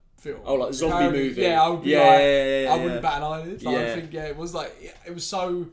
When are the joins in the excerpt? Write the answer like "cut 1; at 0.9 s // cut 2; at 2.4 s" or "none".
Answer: none